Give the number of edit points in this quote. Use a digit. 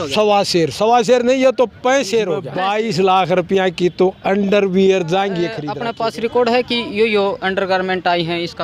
2